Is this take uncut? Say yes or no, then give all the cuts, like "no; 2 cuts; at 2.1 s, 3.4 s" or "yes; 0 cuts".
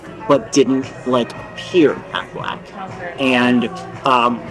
yes; 0 cuts